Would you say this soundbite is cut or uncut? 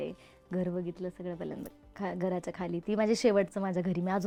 uncut